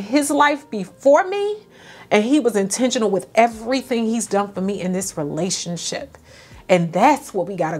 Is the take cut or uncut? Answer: uncut